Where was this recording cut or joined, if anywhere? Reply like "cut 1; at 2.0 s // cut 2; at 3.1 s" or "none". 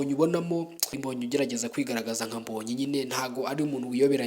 cut 1; at 1.0 s